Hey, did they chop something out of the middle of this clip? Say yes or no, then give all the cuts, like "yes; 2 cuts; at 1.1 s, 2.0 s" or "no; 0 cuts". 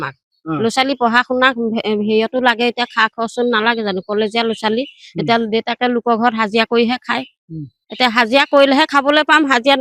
no; 0 cuts